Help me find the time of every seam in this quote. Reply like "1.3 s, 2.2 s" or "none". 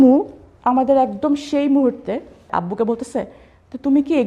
2.5 s